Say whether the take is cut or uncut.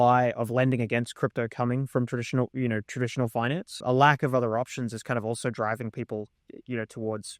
cut